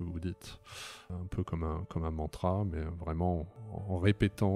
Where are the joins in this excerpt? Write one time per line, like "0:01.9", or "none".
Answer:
0:01.1
0:03.6

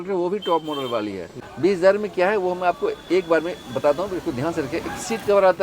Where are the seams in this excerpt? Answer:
0:01.5

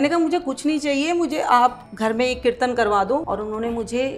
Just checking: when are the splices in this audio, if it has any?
0:01.9
0:03.2

